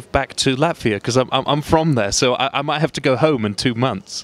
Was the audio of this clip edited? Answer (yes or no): no